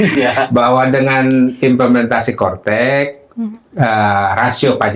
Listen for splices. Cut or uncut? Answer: uncut